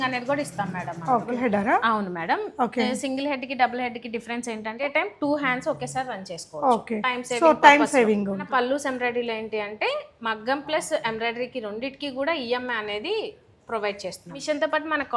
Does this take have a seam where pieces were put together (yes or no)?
yes